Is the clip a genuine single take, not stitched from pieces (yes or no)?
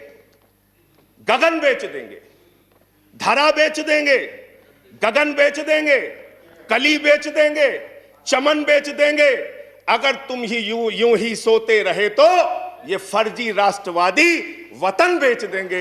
yes